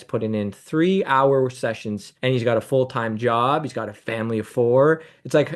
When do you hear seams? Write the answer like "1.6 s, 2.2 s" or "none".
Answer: none